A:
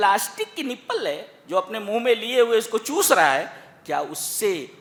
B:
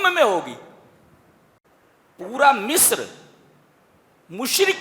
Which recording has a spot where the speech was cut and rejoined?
B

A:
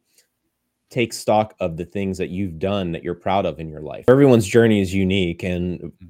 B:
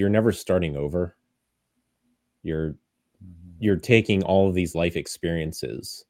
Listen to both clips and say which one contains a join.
A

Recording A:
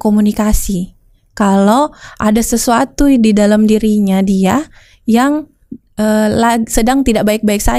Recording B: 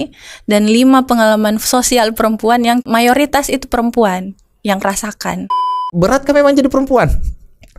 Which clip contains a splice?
B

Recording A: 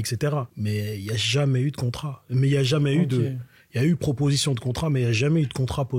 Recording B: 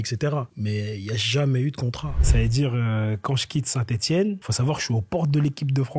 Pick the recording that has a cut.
B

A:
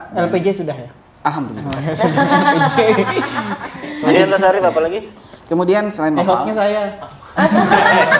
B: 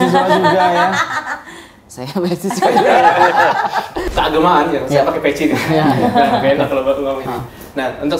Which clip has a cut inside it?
B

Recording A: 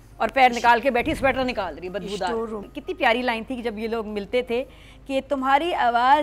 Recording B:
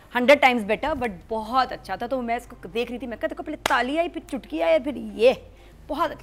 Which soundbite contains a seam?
A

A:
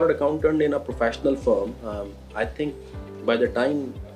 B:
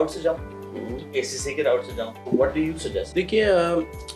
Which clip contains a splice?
B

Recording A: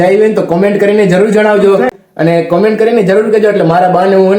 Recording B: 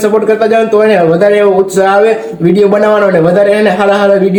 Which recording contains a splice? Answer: A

